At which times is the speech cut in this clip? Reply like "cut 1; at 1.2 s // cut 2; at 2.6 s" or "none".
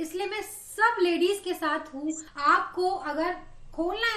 cut 1; at 2.3 s